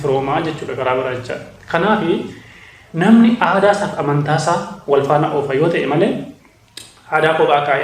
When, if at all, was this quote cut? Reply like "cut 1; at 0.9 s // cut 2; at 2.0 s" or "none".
none